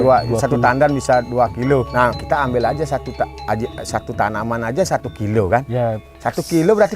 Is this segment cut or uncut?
cut